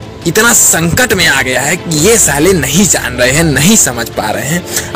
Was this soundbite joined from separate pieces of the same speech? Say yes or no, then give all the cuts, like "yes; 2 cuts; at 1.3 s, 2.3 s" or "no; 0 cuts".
no; 0 cuts